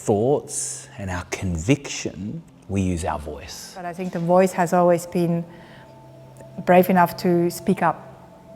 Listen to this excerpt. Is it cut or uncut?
cut